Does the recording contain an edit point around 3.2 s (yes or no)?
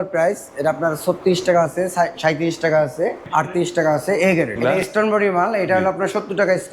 yes